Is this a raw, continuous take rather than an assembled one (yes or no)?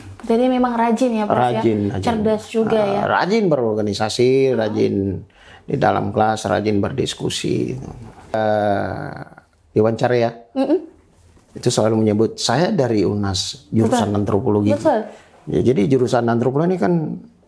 no